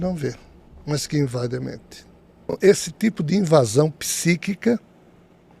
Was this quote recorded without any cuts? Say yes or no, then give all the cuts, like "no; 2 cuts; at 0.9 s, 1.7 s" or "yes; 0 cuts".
no; 1 cut; at 2.3 s